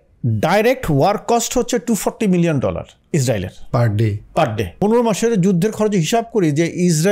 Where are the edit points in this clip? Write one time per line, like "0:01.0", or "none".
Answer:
0:02.9
0:04.7